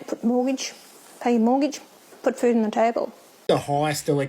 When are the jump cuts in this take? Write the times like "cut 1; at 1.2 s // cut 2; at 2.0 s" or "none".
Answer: cut 1; at 3.3 s